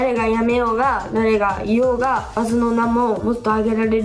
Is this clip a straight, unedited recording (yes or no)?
no